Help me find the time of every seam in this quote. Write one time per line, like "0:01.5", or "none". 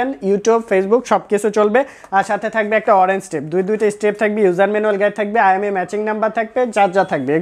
none